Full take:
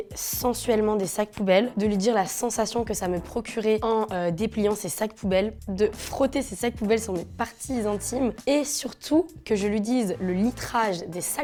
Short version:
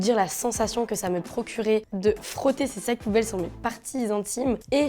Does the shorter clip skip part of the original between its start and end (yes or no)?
yes